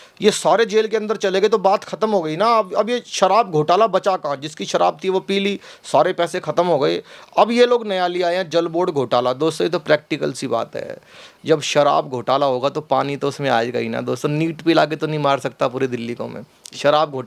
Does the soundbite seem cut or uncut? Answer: uncut